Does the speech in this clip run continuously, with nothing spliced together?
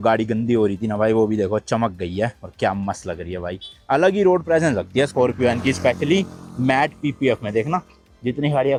yes; 0 cuts

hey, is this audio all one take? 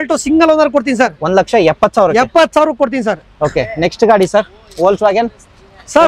yes; 0 cuts

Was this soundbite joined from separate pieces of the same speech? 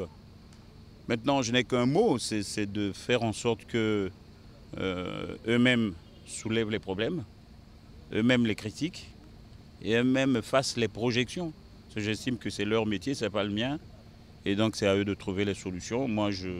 no; 0 cuts

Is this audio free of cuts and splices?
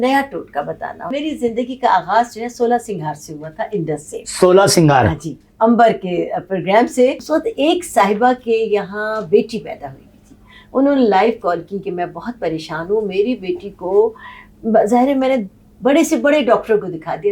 no; 2 cuts; at 1.1 s, 7.2 s

